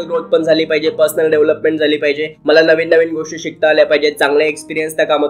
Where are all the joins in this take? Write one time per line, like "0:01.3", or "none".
none